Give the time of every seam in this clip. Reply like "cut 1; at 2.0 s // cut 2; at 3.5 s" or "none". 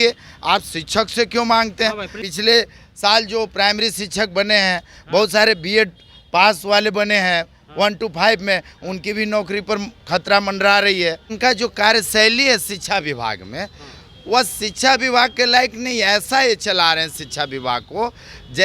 cut 1; at 2.2 s // cut 2; at 11.3 s